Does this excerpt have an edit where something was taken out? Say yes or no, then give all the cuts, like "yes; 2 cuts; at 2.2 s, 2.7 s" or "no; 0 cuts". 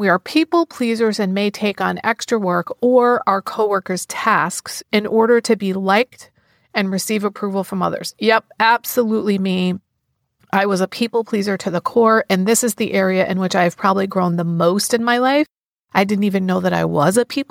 no; 0 cuts